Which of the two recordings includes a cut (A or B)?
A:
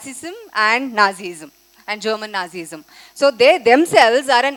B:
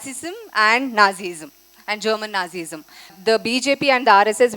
B